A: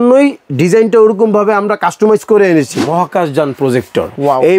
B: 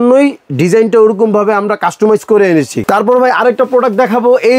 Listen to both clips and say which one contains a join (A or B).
A